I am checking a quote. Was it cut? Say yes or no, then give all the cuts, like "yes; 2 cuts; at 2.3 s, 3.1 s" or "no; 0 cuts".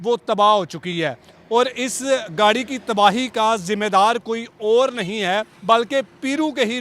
yes; 1 cut; at 5.5 s